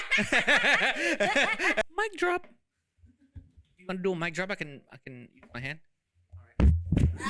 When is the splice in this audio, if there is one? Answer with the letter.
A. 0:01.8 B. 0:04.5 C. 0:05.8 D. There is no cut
A